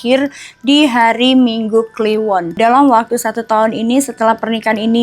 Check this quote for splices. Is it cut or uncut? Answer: cut